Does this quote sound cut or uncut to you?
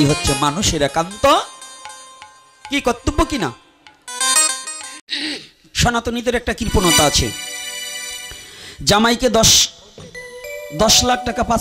cut